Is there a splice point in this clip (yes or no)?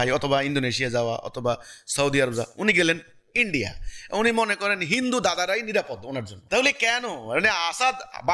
yes